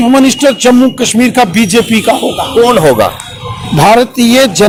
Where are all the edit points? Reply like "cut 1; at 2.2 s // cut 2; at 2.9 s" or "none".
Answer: none